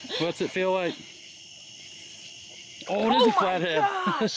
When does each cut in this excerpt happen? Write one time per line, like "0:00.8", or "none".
none